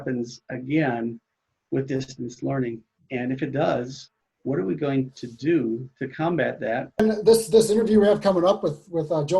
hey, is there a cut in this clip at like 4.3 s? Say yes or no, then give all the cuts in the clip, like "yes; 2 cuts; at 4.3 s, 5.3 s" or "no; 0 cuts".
no; 1 cut; at 7.0 s